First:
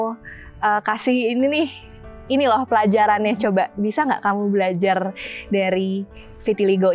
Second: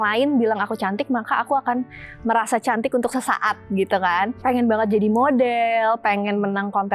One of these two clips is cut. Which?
second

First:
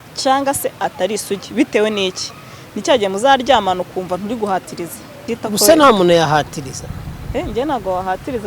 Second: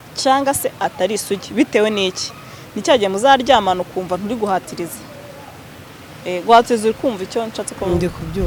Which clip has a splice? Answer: first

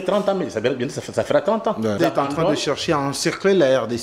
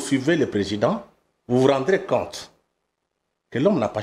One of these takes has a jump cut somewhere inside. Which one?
first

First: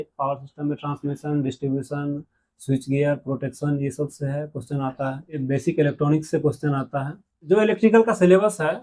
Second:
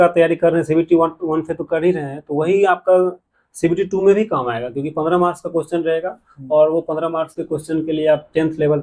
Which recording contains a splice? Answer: first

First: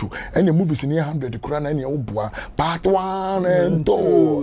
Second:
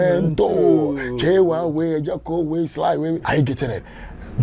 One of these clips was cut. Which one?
second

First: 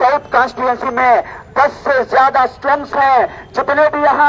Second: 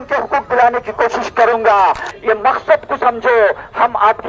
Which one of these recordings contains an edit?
second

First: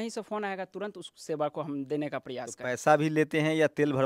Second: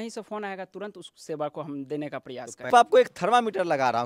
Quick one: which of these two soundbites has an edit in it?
second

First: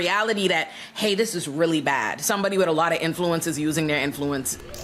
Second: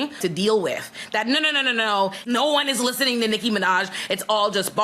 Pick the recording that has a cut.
second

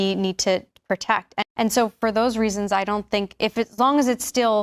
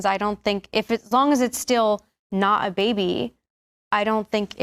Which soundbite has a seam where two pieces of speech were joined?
first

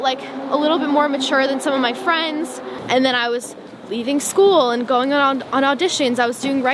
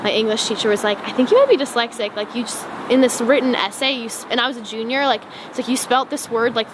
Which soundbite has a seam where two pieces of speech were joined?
first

